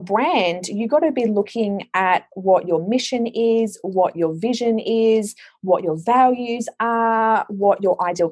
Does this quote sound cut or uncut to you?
uncut